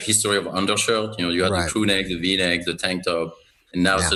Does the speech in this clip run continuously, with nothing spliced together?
yes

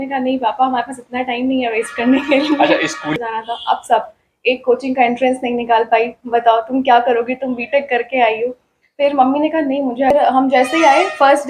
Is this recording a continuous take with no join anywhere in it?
no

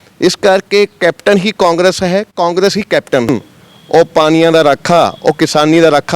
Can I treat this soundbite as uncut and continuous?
no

